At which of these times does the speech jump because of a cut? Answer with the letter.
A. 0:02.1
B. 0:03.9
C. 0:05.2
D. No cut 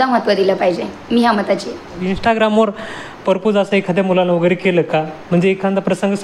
A